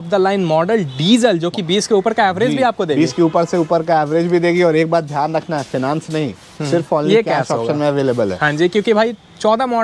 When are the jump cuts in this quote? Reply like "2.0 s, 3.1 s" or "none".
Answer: none

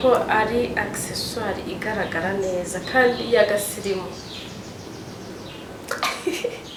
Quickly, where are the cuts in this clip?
none

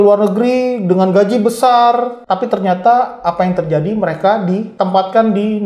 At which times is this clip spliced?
2.2 s, 4.7 s

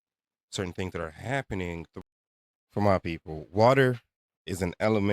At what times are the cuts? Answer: 1.9 s

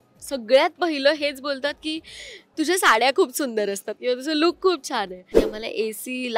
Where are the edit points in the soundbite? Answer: 5.4 s

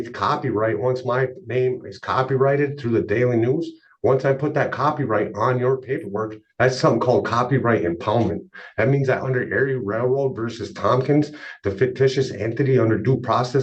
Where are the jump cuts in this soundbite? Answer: none

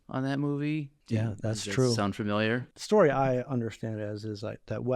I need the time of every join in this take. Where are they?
1.0 s, 2.7 s

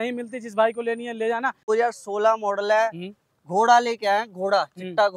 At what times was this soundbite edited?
1.7 s

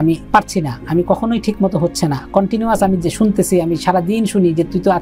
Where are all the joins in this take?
none

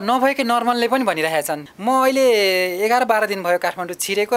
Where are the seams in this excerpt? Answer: 1.7 s

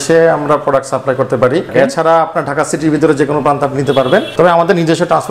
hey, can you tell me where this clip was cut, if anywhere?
1.7 s, 4.3 s

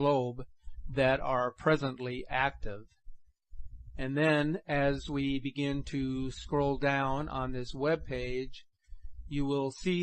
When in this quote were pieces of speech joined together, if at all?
2.2 s

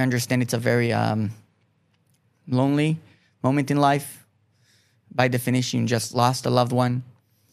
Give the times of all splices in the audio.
none

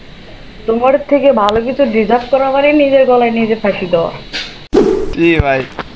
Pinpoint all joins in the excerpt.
4.6 s

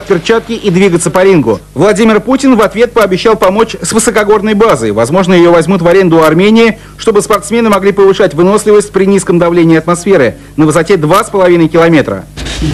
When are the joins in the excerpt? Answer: 1.5 s

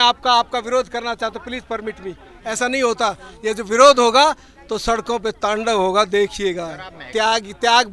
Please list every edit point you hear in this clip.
7.0 s

